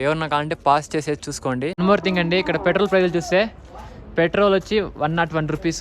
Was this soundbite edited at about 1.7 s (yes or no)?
yes